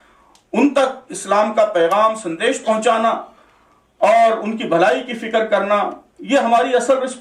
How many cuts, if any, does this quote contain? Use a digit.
0